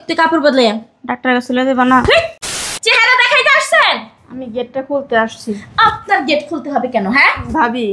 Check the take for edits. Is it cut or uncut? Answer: cut